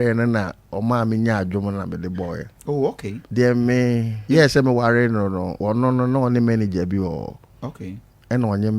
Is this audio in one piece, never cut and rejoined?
no; 3 cuts; at 3.1 s, 4.1 s, 5.5 s

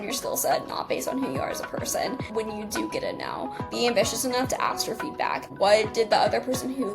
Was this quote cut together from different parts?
yes; 3 cuts; at 2.3 s, 3.7 s, 5.5 s

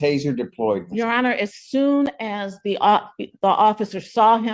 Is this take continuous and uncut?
yes; 0 cuts

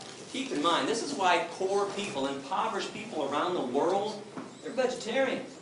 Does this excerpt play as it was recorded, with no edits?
no; 1 cut; at 4.1 s

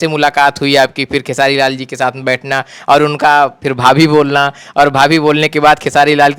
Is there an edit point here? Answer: no; 0 cuts

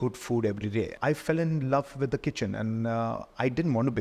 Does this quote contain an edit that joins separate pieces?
yes; 1 cut; at 0.9 s

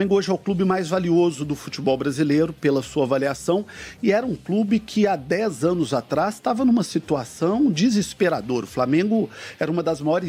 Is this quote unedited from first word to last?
yes; 0 cuts

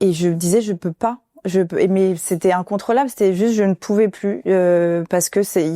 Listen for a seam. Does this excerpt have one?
no; 0 cuts

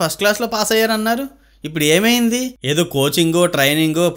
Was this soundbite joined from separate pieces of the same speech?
yes; 1 cut; at 2.5 s

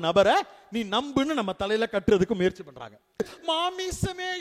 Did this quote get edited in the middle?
yes; 1 cut; at 3.2 s

